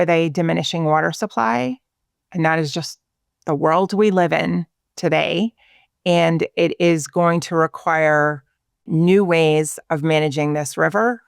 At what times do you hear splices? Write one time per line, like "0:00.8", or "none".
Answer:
0:08.9

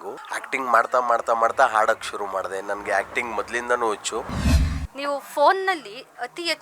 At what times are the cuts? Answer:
0:04.4

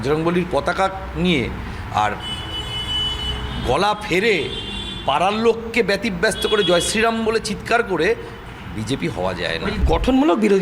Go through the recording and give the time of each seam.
0:09.7

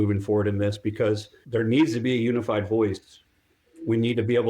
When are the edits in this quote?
0:01.3

